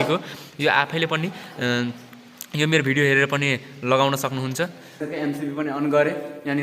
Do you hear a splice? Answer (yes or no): yes